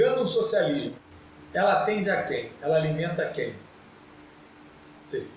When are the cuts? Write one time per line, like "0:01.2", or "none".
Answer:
0:01.0